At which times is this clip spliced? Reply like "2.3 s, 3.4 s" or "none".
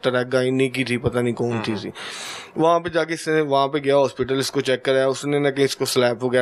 none